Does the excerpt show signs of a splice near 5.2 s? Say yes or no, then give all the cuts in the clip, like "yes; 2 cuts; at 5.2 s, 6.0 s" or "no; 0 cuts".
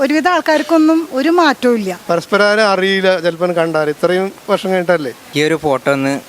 yes; 2 cuts; at 1.9 s, 5.2 s